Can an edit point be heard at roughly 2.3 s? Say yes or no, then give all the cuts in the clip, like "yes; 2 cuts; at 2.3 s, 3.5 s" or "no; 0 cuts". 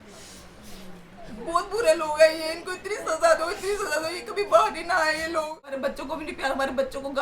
no; 1 cut; at 5.8 s